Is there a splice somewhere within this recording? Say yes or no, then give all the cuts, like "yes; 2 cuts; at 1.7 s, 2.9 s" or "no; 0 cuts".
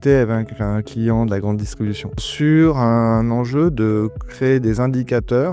yes; 1 cut; at 2.2 s